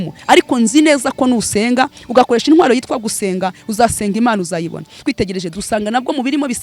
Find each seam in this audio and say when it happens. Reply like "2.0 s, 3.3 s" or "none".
5.0 s

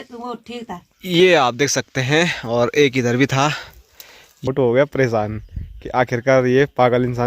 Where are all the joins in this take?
0.9 s, 4.5 s

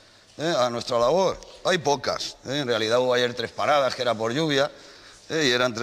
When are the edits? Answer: none

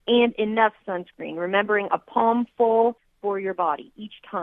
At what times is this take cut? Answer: 3.1 s

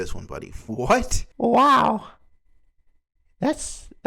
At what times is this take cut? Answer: 1.2 s

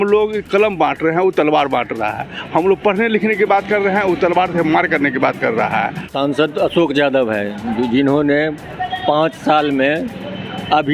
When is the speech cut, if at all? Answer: 6.0 s

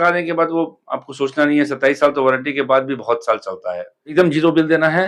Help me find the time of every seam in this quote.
4.0 s

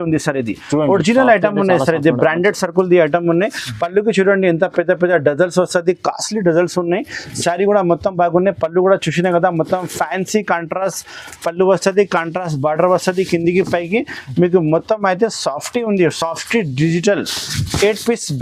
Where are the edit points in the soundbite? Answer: none

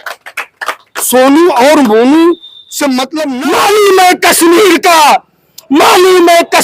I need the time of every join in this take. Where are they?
3.1 s

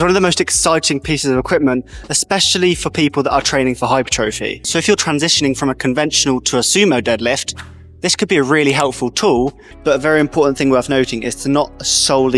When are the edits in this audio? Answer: 4.6 s, 9.7 s

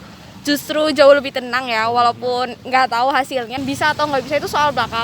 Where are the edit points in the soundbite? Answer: 3.6 s

